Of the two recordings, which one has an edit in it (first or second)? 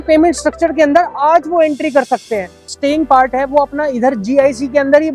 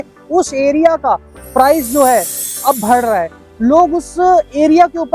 first